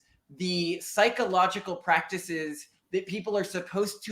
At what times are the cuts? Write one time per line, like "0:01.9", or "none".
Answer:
none